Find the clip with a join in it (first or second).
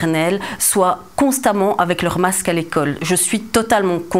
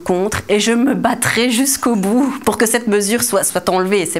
second